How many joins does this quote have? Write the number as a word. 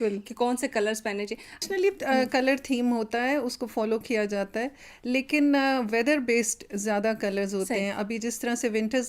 one